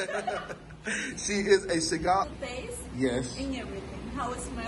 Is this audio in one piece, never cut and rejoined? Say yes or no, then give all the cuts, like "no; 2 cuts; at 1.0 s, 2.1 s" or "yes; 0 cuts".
no; 1 cut; at 2.3 s